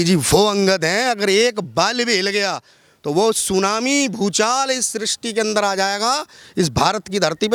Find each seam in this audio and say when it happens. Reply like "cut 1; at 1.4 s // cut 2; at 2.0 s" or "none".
none

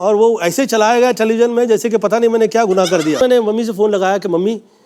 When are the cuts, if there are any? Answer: cut 1; at 3.2 s

